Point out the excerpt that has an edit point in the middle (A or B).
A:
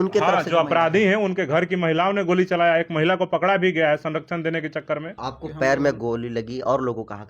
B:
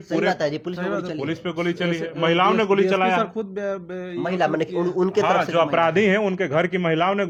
A